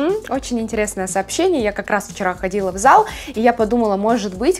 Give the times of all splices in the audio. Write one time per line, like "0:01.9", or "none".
none